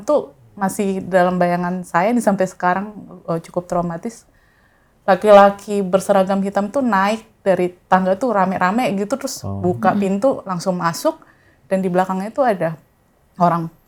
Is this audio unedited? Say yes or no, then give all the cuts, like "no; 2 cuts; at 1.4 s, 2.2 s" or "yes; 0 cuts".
yes; 0 cuts